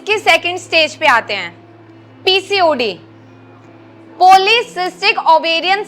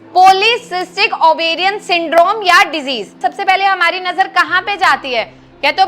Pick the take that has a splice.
second; 1 cut; at 3.1 s

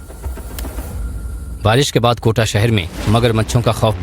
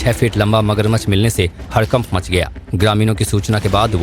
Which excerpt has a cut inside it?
second; 1 cut; at 3.0 s

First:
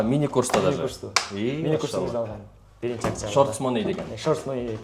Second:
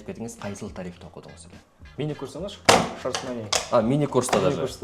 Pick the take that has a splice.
second; 1 cut; at 1.7 s

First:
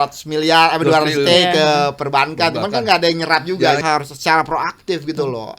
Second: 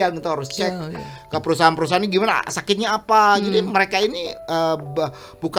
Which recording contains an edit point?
first; 1 cut; at 3.8 s

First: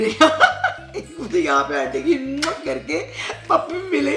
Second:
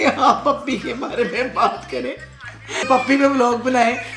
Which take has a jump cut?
second; 1 cut; at 2.9 s

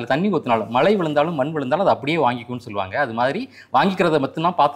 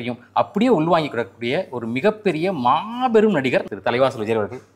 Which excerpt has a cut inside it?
second; 1 cut; at 3.7 s

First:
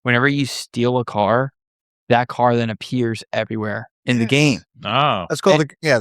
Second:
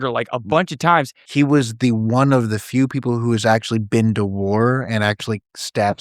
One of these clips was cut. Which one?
second; 1 cut; at 1.2 s

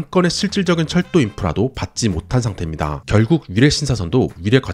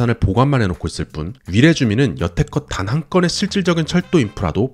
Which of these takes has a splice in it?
first; 1 cut; at 3.0 s

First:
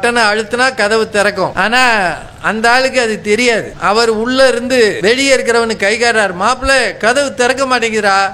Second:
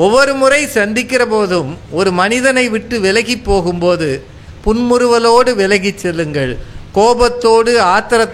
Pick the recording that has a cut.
first; 3 cuts; at 1.5 s, 3.7 s, 5.0 s

